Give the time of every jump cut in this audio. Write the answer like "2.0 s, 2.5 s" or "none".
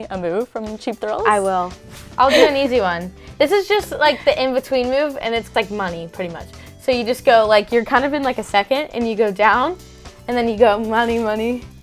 2.0 s